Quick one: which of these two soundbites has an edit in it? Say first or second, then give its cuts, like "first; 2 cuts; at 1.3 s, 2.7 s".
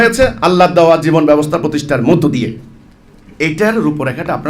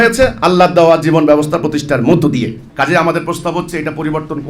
second; 1 cut; at 2.6 s